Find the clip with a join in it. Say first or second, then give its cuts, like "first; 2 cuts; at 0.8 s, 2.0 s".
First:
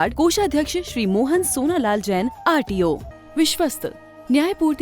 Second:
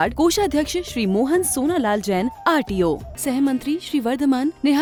first; 1 cut; at 3.1 s